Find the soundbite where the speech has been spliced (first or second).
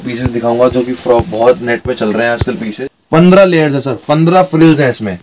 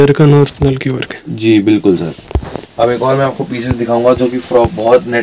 first